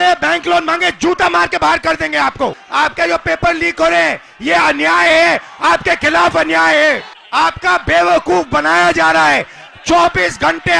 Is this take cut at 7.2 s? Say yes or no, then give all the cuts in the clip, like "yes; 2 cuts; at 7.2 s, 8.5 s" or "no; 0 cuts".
yes; 2 cuts; at 2.6 s, 7.2 s